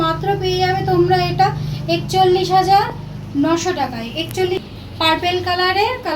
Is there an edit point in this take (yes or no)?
yes